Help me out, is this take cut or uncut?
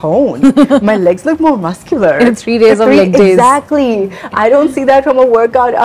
uncut